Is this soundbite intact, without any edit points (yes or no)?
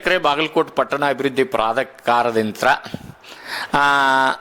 yes